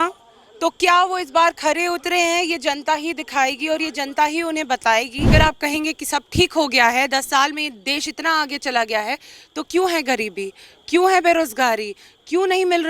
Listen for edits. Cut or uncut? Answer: cut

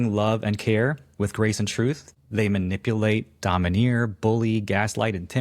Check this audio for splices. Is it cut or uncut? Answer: cut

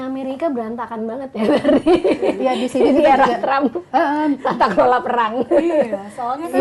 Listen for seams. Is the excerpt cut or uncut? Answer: uncut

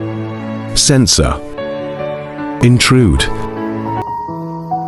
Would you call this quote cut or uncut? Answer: cut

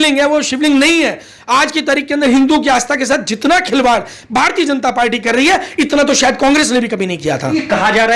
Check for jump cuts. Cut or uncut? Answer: uncut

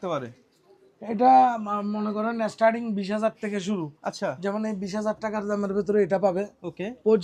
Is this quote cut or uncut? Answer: uncut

